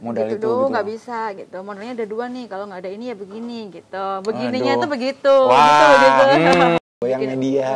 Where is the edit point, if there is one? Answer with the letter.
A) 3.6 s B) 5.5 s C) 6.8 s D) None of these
C